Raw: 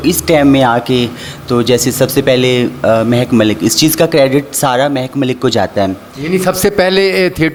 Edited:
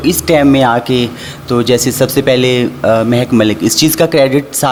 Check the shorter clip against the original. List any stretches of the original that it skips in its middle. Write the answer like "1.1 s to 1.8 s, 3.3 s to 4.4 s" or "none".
none